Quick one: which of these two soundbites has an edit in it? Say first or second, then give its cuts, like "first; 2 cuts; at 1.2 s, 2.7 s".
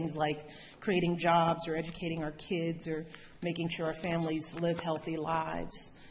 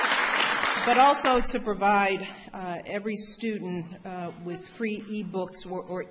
second; 1 cut; at 1.6 s